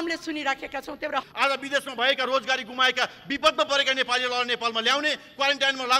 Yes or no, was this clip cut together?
yes